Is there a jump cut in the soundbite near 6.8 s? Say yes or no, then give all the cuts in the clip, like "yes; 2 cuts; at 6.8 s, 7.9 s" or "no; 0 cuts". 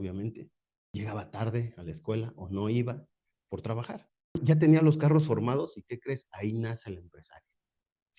no; 2 cuts; at 0.9 s, 4.4 s